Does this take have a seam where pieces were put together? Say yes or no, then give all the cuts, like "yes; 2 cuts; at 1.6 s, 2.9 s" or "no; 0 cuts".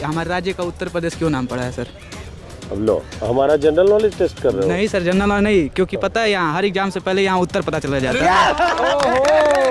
no; 0 cuts